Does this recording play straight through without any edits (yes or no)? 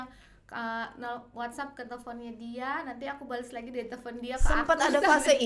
yes